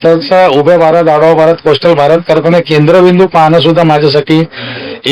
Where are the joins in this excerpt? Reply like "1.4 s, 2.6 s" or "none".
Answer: none